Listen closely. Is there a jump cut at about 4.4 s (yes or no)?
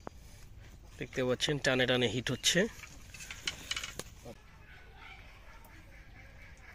yes